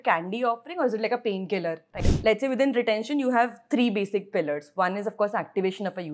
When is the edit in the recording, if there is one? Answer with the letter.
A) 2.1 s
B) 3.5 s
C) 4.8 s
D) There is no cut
A